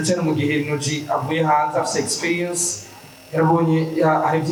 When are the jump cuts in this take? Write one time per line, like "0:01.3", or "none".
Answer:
none

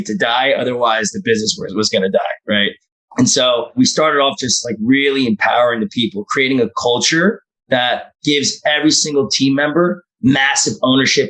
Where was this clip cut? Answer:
none

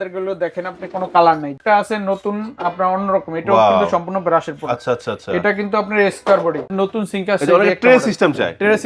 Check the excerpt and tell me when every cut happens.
0:01.5
0:06.7

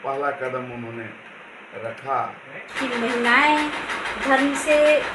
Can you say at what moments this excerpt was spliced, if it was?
0:02.7

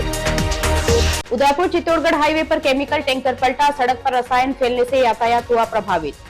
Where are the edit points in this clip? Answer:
0:01.1

